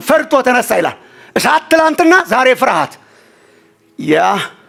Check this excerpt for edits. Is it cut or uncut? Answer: uncut